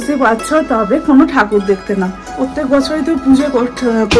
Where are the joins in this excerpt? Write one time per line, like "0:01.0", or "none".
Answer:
0:02.4